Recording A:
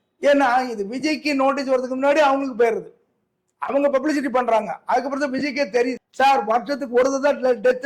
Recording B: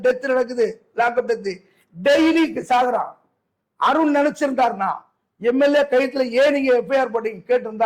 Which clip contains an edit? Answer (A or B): A